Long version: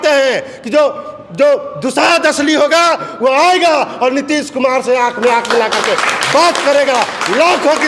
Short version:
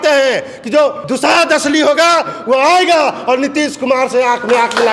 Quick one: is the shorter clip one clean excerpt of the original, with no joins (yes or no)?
no